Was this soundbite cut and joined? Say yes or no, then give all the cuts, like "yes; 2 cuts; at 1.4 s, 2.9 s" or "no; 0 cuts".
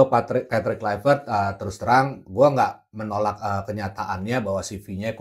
no; 0 cuts